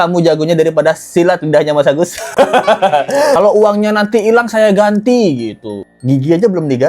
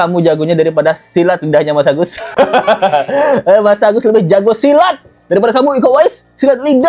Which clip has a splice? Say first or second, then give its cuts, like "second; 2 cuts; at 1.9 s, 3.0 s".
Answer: first; 1 cut; at 3.4 s